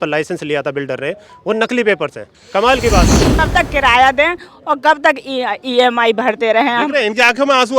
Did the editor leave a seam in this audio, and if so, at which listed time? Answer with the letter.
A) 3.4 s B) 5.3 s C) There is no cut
A